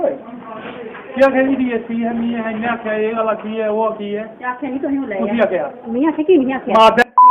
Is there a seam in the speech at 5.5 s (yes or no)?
no